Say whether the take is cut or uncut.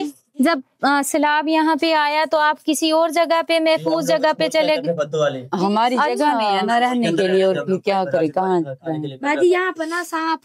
uncut